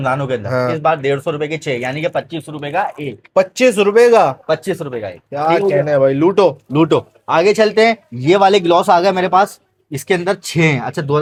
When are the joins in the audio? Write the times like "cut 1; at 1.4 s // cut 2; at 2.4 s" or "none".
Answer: none